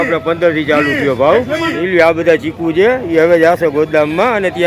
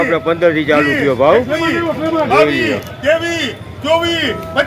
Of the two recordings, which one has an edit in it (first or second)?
first